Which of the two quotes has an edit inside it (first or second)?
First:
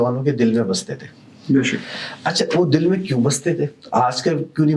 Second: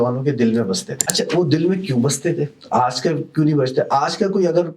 second